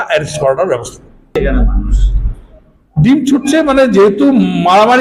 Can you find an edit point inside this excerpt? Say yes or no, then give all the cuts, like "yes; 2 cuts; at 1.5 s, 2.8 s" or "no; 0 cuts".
yes; 1 cut; at 1.3 s